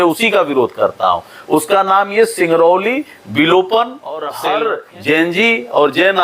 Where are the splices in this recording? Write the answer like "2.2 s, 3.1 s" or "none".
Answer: 4.3 s